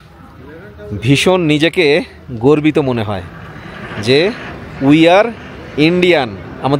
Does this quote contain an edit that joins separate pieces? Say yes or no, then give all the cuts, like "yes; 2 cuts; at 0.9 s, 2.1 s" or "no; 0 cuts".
no; 0 cuts